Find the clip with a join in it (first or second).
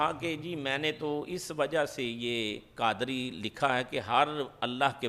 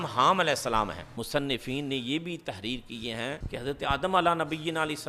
second